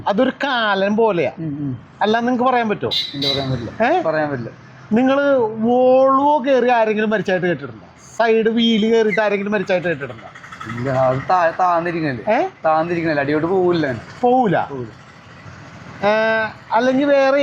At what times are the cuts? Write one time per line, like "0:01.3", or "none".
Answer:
none